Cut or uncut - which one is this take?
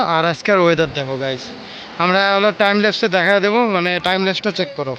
uncut